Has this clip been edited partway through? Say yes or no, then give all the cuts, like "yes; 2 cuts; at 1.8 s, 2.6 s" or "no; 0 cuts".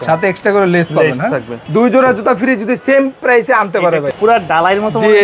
yes; 2 cuts; at 1.6 s, 4.1 s